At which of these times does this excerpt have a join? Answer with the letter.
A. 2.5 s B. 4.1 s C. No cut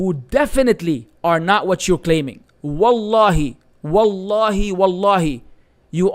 C